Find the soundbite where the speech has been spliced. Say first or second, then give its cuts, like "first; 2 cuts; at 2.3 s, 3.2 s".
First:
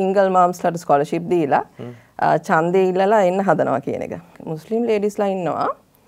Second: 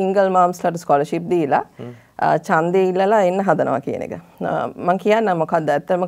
first; 1 cut; at 4.3 s